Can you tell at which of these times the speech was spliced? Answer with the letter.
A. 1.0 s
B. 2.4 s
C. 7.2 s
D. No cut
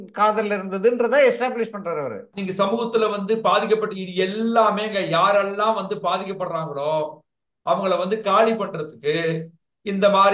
B